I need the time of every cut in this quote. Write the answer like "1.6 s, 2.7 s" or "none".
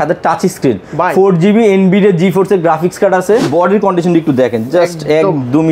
3.5 s